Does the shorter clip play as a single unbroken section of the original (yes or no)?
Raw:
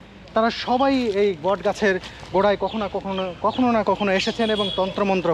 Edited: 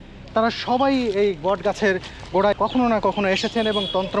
no